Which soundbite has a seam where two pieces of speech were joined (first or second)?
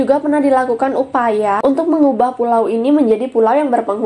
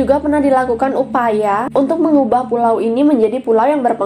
first